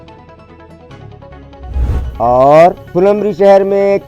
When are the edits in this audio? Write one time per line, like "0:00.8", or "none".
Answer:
0:02.2